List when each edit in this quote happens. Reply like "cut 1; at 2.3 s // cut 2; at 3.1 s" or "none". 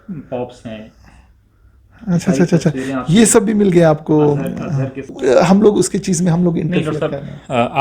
cut 1; at 5.1 s